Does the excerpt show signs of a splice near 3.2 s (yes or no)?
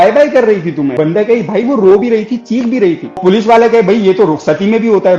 yes